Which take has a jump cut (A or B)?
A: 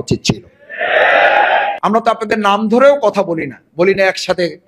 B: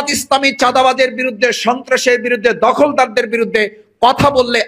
A